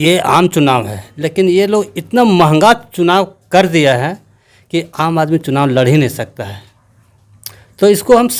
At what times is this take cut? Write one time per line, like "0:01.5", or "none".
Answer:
none